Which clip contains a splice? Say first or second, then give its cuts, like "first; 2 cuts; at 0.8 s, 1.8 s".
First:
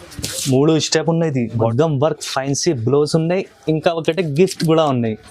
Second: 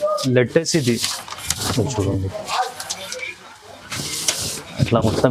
first; 1 cut; at 1.5 s